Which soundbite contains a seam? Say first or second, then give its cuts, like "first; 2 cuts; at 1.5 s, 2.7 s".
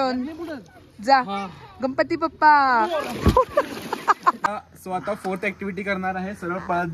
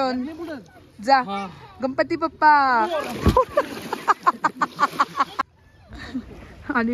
first; 1 cut; at 4.5 s